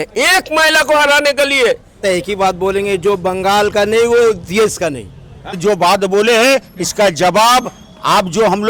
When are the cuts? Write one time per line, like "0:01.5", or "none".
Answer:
0:02.0
0:05.6